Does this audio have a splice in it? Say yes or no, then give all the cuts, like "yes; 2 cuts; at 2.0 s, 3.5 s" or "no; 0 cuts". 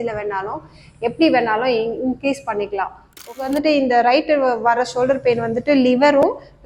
yes; 1 cut; at 3.4 s